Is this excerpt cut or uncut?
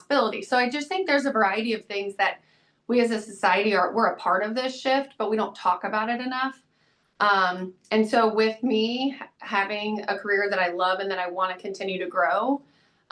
uncut